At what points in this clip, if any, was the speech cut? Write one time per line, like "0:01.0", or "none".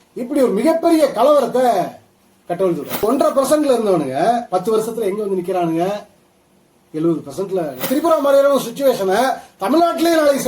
0:03.0
0:07.9